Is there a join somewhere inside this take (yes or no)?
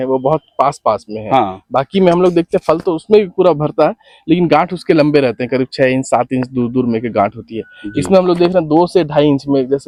no